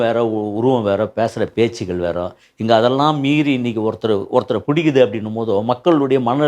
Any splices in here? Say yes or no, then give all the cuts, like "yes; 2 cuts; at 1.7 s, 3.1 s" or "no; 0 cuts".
no; 0 cuts